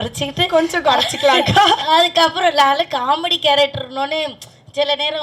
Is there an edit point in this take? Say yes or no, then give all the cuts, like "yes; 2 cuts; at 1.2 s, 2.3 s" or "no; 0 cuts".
no; 0 cuts